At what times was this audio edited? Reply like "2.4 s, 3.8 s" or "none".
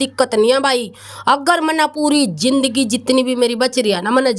none